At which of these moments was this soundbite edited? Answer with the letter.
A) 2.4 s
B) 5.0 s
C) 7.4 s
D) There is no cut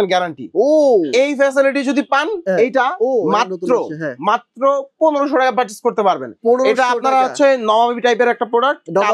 A